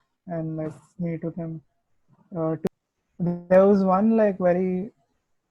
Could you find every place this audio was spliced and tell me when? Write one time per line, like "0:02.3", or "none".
0:02.7

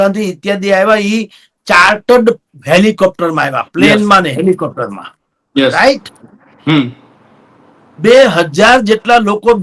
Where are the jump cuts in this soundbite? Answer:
none

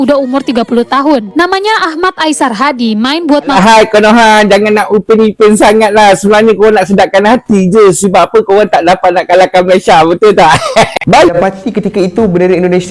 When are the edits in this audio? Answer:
0:03.6
0:11.3

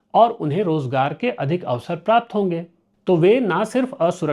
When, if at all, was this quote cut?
0:02.9

